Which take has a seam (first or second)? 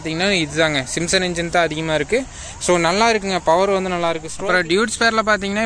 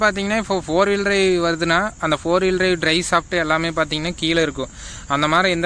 first